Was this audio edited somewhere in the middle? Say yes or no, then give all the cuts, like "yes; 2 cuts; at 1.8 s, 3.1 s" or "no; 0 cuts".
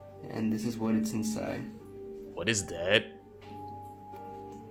no; 0 cuts